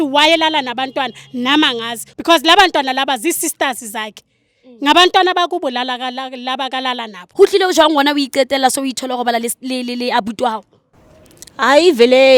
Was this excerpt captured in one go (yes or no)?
no